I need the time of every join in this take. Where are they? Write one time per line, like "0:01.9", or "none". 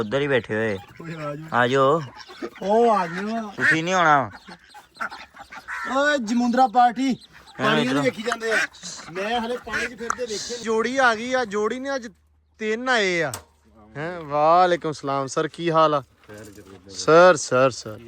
0:10.6